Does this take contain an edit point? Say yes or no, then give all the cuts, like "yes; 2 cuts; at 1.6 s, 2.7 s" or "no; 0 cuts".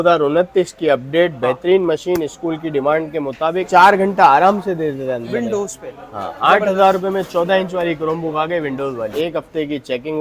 yes; 2 cuts; at 3.7 s, 9.1 s